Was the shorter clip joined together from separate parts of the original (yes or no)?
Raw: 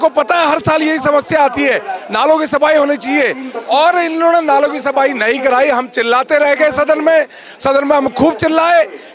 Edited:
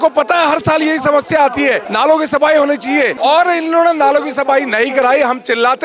yes